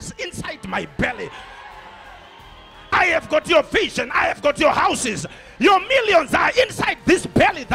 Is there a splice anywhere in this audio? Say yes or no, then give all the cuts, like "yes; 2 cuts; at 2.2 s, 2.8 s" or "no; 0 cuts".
no; 0 cuts